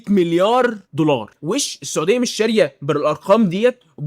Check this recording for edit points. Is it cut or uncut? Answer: cut